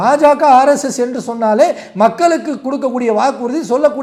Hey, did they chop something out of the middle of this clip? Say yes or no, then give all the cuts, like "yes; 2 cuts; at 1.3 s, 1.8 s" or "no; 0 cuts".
no; 0 cuts